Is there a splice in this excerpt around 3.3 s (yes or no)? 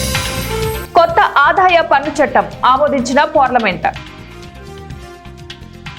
no